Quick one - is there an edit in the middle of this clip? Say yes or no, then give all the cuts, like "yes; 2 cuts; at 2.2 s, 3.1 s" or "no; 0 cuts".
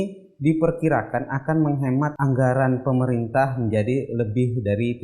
yes; 1 cut; at 2.1 s